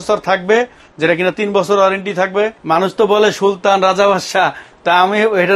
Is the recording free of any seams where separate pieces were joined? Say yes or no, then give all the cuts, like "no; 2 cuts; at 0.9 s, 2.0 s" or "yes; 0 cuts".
no; 1 cut; at 2.5 s